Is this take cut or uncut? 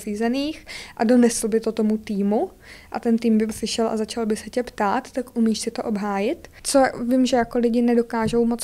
cut